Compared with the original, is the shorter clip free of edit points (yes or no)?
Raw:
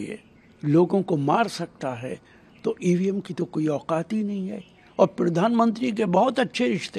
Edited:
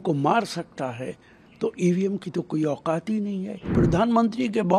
no